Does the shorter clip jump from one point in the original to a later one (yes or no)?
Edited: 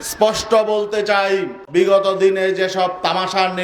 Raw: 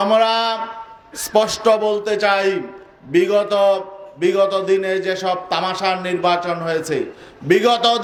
yes